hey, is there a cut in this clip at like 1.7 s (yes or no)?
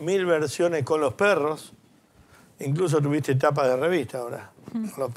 no